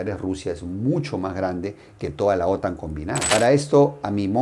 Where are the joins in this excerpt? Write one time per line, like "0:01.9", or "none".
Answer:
0:03.2